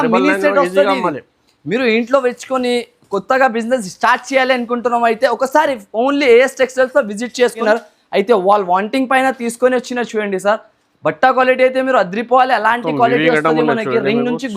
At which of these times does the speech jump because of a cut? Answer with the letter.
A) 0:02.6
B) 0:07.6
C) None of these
B